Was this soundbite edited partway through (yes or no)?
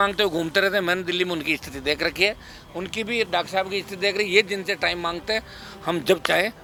no